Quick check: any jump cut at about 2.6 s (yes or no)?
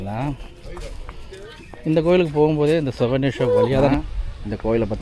no